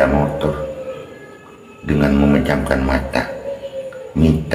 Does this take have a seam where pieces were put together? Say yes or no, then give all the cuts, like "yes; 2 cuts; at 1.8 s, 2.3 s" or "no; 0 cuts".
no; 0 cuts